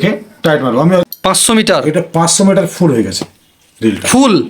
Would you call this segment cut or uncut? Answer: cut